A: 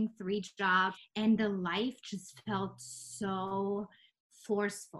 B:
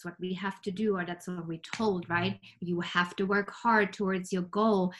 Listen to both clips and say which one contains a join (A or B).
A